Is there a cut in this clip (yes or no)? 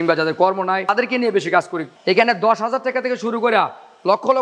yes